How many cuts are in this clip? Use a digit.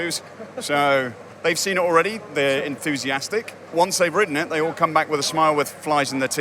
2